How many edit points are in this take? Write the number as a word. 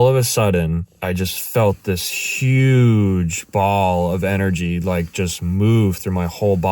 one